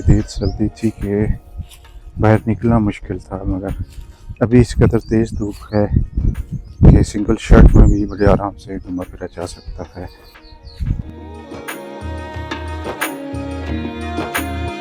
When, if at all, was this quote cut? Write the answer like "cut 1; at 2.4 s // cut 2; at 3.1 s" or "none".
none